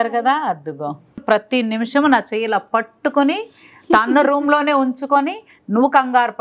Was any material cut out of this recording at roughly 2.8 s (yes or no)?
no